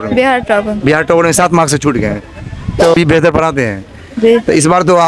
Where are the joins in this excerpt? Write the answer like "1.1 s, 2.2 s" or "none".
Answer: 2.9 s